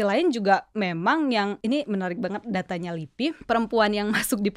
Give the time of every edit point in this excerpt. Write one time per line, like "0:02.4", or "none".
0:01.6
0:03.4

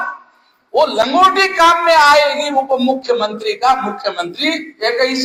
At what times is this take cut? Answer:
none

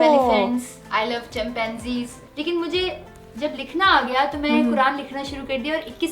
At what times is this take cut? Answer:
0:02.2

